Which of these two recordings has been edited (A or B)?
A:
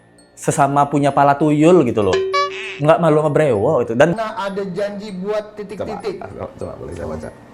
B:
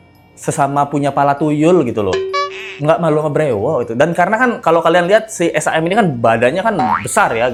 A